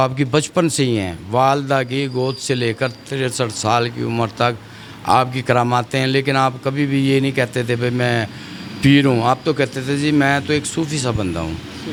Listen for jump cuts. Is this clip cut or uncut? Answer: uncut